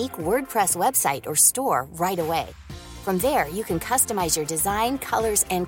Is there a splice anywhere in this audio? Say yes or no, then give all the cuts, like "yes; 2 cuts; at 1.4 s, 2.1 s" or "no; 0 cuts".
no; 0 cuts